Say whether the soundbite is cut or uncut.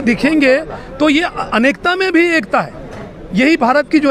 uncut